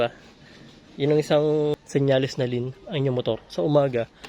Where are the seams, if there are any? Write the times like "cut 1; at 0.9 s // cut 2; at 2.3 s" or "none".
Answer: cut 1; at 1.7 s